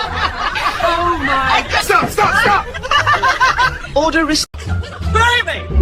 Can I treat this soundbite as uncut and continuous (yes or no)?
yes